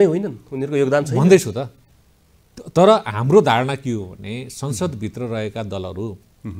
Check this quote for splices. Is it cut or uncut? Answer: uncut